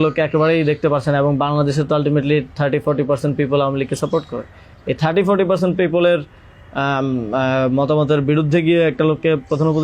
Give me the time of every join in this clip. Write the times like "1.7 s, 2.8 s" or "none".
none